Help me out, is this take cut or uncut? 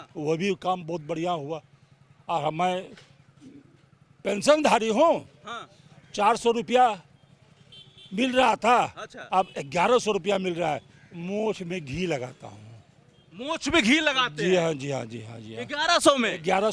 uncut